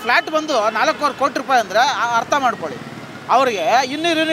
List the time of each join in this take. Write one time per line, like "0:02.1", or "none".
none